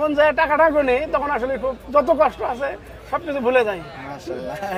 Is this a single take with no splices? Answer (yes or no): yes